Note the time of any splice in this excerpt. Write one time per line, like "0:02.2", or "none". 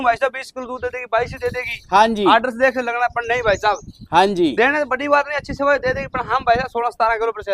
none